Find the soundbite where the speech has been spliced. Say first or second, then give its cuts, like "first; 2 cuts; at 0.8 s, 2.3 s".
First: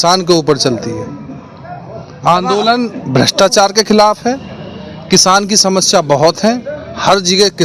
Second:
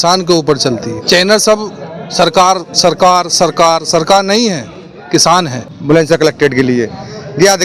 second; 2 cuts; at 1.0 s, 5.7 s